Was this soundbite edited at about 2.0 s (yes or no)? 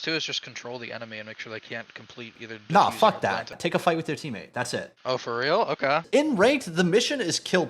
no